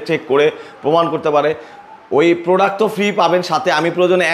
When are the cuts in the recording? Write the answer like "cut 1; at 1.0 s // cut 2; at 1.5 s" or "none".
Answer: none